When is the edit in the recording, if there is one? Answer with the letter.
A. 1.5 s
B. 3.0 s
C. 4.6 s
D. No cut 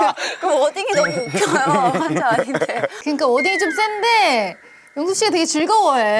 B